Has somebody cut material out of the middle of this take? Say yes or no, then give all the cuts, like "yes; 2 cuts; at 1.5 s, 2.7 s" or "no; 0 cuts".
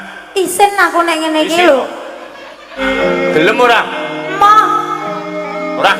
yes; 1 cut; at 2.7 s